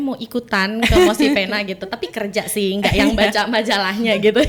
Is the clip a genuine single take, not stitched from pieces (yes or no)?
yes